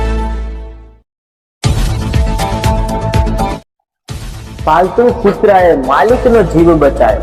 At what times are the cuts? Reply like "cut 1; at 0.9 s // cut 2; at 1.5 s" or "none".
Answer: cut 1; at 3.6 s